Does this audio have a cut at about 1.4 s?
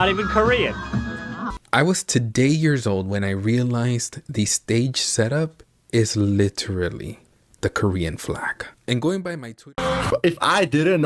yes; 2 cuts; at 1.4 s, 9.8 s

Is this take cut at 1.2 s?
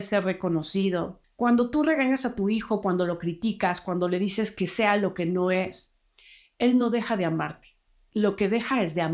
yes; 1 cut; at 1.2 s

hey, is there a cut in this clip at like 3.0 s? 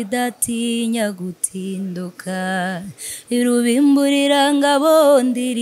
no; 0 cuts

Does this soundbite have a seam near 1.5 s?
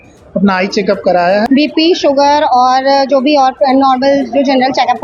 yes; 1 cut; at 1.5 s

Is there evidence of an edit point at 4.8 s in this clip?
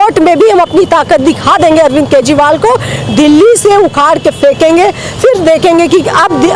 no; 0 cuts

